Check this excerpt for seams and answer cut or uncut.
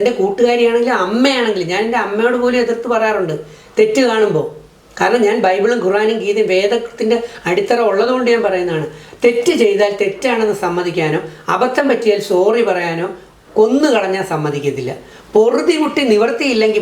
uncut